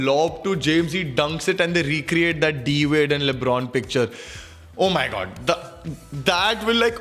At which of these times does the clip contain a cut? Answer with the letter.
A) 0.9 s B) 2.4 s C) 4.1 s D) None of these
D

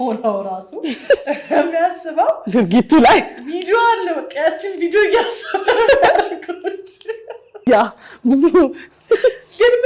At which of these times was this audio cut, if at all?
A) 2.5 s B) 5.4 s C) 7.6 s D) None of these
C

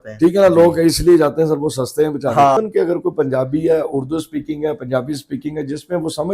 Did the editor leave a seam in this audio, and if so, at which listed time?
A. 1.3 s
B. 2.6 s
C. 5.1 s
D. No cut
B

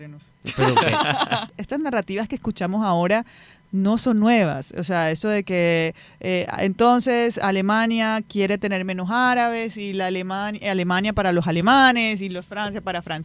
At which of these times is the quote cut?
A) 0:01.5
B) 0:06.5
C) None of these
A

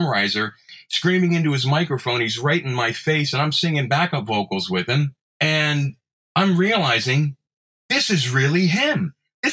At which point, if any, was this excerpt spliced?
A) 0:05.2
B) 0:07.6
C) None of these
A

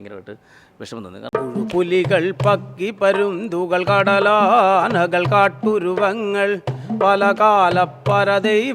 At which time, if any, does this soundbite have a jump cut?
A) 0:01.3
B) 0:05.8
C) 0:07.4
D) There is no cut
A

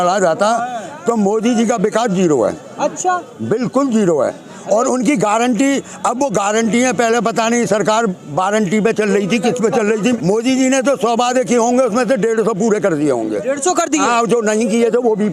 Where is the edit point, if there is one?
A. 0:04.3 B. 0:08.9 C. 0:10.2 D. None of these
C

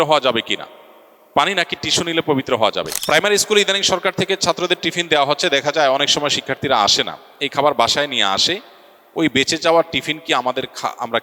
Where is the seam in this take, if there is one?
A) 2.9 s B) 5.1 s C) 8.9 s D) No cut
A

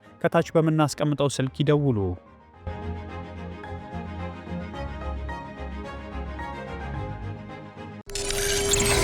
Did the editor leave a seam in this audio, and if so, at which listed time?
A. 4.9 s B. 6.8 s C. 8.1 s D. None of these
C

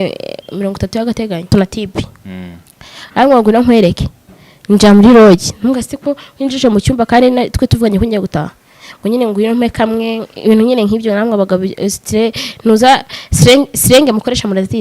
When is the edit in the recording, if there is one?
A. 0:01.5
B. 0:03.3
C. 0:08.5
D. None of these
A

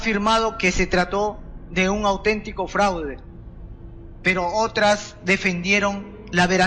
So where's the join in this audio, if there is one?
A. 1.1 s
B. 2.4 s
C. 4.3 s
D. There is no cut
D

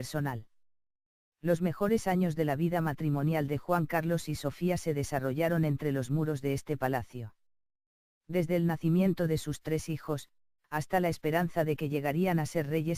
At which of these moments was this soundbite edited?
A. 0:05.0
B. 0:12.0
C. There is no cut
C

